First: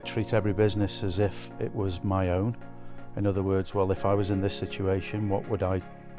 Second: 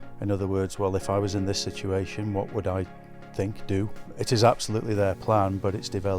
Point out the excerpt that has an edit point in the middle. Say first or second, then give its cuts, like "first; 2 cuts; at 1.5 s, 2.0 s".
second; 1 cut; at 4.1 s